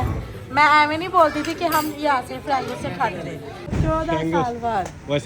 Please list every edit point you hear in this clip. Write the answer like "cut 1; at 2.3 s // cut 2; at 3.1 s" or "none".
cut 1; at 3.6 s